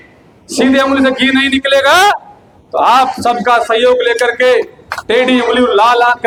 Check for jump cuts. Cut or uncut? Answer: uncut